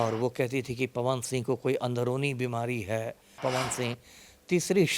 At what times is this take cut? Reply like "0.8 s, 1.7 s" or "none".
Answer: 3.3 s